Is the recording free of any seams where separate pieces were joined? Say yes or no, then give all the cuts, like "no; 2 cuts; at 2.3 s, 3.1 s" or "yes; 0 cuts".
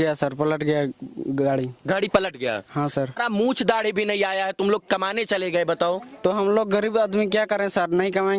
no; 1 cut; at 3.2 s